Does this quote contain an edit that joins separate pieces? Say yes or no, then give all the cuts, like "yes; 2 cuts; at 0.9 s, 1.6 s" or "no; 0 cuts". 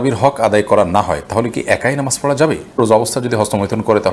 yes; 1 cut; at 2.8 s